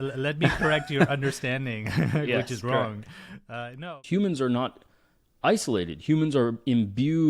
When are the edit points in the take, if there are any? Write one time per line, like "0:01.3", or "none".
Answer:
0:03.8